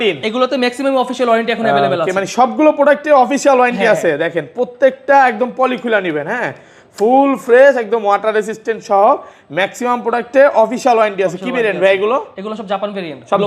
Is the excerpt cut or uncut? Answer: uncut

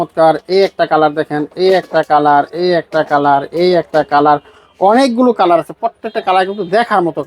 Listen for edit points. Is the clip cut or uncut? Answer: uncut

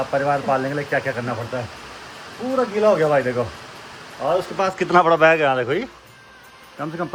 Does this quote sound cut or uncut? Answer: uncut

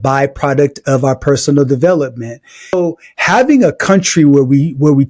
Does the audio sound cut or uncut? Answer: cut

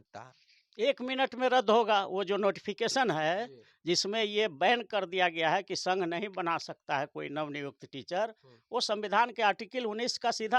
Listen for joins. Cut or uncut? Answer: uncut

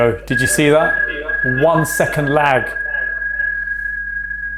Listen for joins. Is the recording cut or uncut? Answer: uncut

